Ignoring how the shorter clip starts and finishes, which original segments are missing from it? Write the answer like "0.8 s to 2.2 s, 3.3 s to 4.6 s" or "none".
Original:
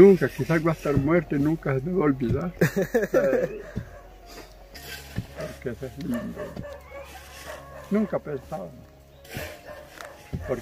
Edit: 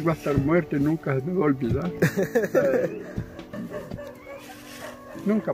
4.1 s to 6.2 s

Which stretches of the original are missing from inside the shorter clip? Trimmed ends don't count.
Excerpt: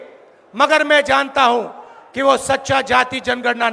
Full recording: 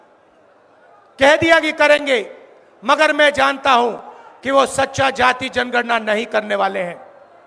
none

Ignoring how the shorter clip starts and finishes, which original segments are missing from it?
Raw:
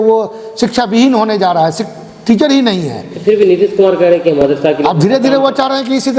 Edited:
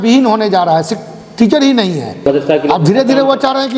3.1 s to 4.4 s

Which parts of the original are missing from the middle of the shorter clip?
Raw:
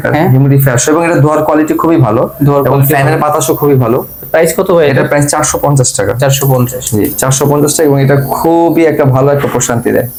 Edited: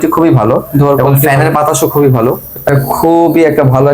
4.3 s to 8.1 s

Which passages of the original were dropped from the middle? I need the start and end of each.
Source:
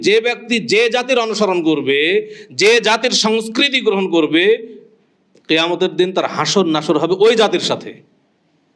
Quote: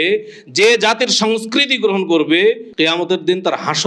4.7 s to 5.4 s

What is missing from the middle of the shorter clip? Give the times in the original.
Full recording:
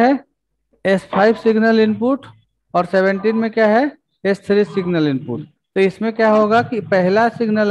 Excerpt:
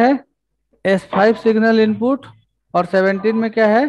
none

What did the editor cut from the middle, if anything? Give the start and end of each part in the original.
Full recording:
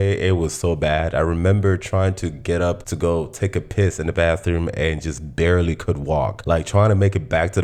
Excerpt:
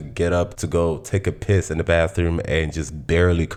none

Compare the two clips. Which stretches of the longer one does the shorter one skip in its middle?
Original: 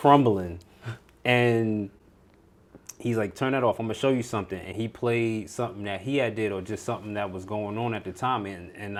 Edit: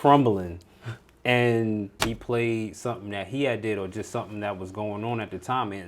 1.9 s to 4.7 s

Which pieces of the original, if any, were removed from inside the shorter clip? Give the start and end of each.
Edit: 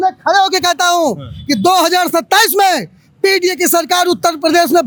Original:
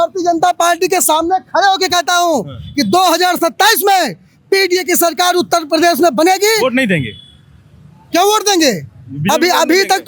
none

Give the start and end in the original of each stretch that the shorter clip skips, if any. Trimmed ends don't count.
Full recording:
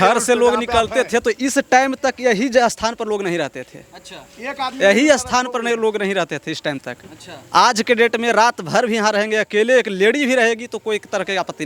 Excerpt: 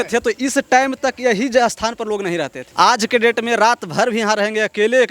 3.6 s to 7.4 s

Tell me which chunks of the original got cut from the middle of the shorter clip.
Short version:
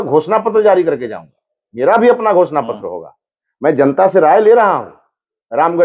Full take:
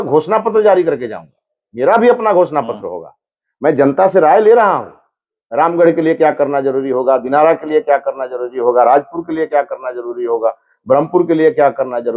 none

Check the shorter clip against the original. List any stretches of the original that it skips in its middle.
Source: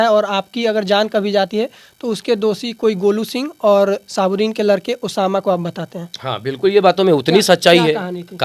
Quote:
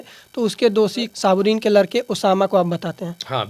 2.7 s to 4.0 s

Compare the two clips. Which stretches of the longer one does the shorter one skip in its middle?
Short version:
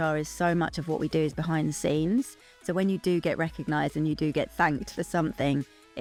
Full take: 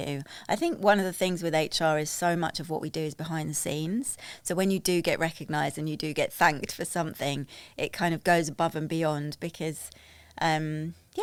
none

